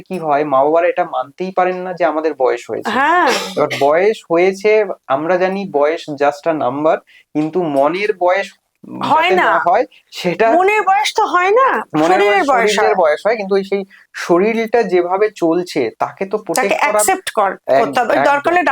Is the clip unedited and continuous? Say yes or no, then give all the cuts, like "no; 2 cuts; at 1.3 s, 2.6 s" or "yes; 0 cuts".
yes; 0 cuts